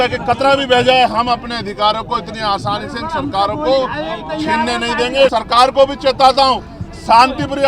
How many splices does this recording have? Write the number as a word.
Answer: one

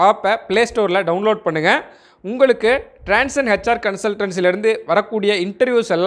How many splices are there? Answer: zero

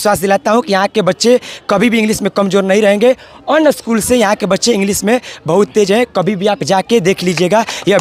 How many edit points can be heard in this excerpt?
zero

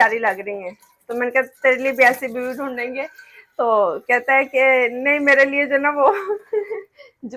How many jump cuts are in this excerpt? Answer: zero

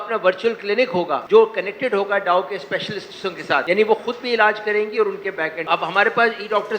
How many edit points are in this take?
two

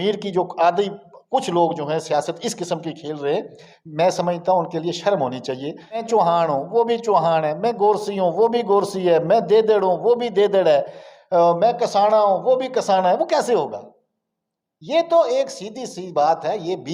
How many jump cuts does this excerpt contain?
one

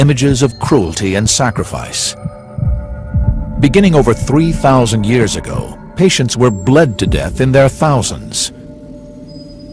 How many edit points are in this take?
one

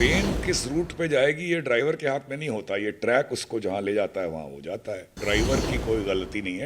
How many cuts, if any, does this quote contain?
one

